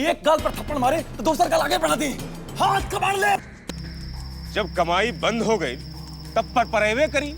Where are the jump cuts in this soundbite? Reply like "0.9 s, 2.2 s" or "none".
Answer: 3.5 s